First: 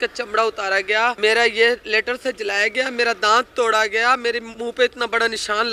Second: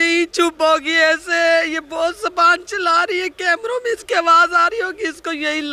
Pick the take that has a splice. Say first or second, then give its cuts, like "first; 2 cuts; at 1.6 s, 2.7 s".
first; 2 cuts; at 1.2 s, 4.5 s